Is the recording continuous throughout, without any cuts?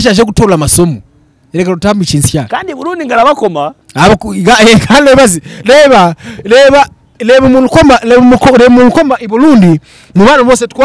yes; 0 cuts

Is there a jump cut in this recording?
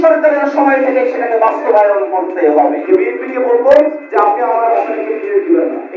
yes; 1 cut; at 2.8 s

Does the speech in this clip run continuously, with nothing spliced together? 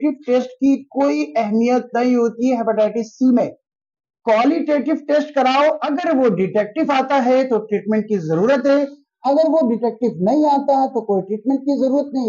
yes; 0 cuts

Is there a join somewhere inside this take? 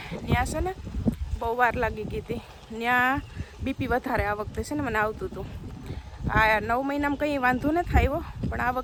no; 0 cuts

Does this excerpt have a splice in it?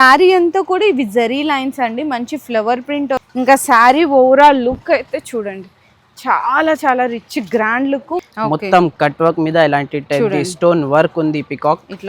yes; 2 cuts; at 3.3 s, 8.3 s

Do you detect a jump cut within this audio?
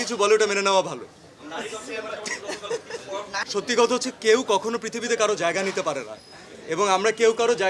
yes; 2 cuts; at 1.3 s, 3.4 s

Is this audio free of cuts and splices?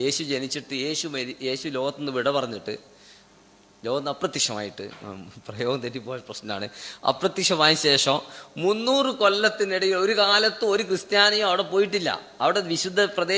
yes; 0 cuts

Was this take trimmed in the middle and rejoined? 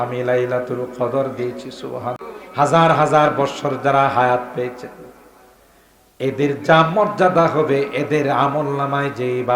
yes; 1 cut; at 2.2 s

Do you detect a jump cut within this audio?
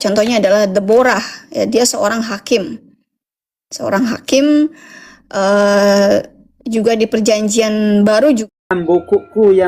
yes; 1 cut; at 8.4 s

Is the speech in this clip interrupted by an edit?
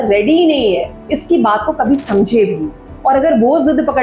yes; 1 cut; at 0.9 s

